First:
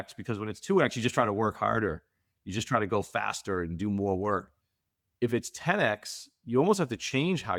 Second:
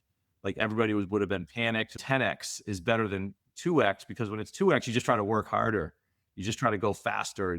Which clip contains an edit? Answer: second; 1 cut; at 2.0 s

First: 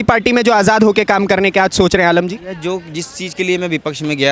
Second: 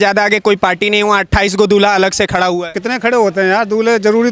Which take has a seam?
second; 1 cut; at 2.7 s

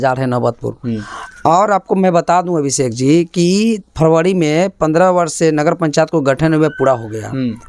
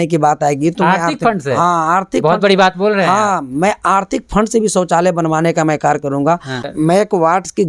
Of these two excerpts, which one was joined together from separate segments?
second; 1 cut; at 6.7 s

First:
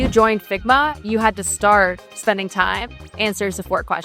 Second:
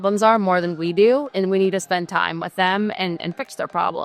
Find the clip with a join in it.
first; 1 cut; at 2.1 s

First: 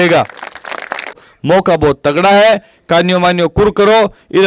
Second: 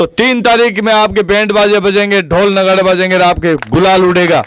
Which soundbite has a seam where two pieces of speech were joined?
first; 1 cut; at 1.3 s

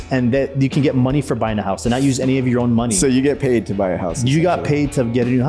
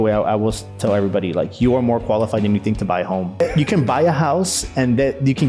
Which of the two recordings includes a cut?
second; 1 cut; at 3.4 s

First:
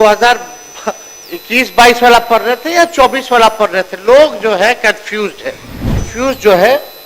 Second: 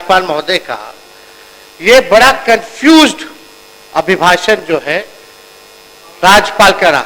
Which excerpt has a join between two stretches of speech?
first; 1 cut; at 6.0 s

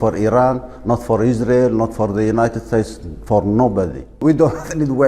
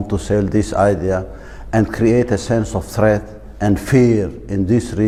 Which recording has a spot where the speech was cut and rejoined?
first; 1 cut; at 4.1 s

